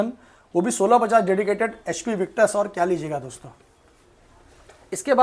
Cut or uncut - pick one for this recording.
uncut